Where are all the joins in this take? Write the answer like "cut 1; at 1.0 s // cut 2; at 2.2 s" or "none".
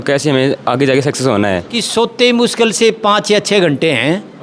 cut 1; at 1.8 s